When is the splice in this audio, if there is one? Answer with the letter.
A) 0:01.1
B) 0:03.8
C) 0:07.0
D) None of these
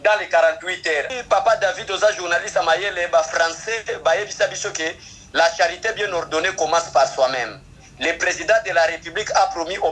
A